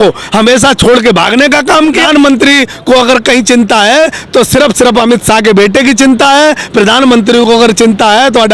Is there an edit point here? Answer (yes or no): yes